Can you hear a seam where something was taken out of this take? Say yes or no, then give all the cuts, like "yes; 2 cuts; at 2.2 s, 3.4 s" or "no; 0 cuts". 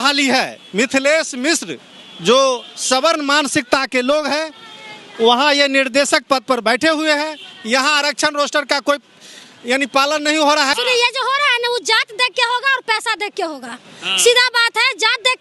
yes; 1 cut; at 10.7 s